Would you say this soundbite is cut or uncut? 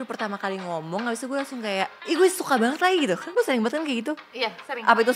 cut